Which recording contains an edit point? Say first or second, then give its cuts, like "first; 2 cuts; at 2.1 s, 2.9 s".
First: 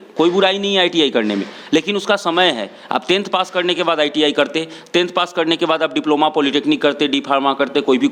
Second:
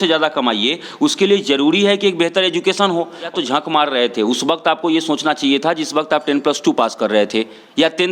second; 1 cut; at 3.3 s